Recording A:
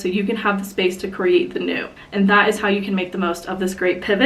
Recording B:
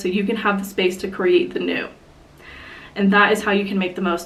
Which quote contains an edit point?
A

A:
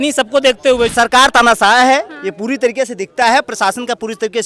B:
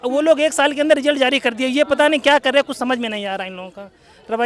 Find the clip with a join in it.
A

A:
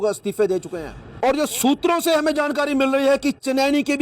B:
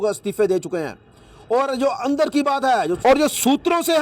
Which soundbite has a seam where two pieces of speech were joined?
A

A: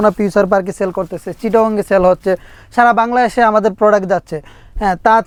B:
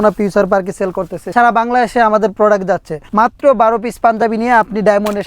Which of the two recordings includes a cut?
B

